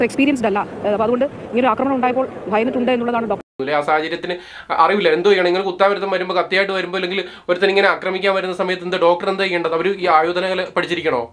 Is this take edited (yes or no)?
yes